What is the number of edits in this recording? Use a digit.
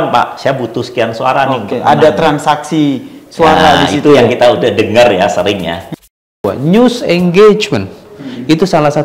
1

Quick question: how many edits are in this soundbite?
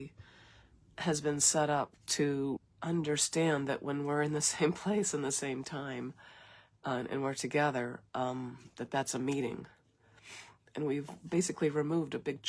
1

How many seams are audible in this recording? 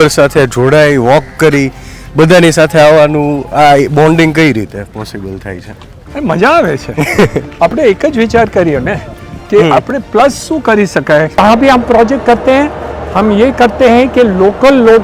1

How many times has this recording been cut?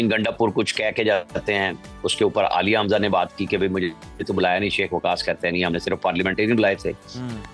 0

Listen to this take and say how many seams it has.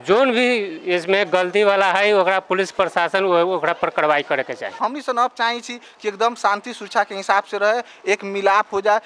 1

